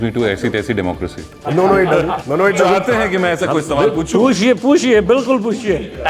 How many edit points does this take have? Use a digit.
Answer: 2